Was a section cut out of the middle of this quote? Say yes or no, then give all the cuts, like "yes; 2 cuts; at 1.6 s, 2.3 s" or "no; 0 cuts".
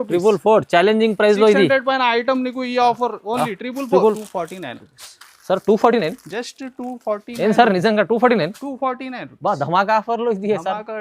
yes; 1 cut; at 4.2 s